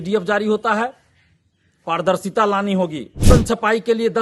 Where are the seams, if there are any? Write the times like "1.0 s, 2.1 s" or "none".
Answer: 3.2 s